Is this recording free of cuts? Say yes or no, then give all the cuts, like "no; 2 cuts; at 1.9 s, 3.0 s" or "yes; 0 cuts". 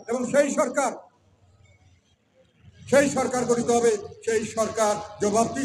yes; 0 cuts